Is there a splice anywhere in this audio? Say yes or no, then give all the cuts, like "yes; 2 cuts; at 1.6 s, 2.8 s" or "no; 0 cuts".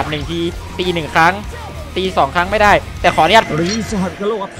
yes; 1 cut; at 3.5 s